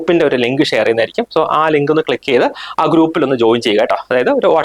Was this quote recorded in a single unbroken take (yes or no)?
yes